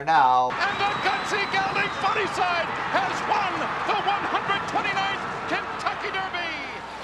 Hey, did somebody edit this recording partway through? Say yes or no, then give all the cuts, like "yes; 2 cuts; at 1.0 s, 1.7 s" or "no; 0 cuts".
no; 0 cuts